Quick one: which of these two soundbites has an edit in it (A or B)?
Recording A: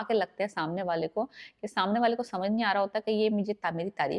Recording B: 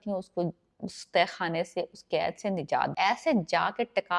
B